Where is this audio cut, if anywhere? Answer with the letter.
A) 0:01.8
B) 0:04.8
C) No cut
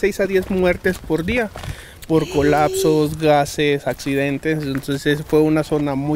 C